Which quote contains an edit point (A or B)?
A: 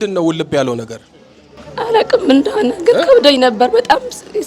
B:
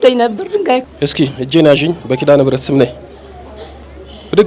B